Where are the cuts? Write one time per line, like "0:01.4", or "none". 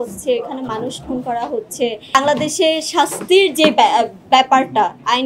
0:02.1